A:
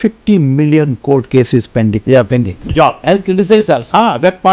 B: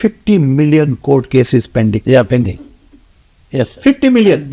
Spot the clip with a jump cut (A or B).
A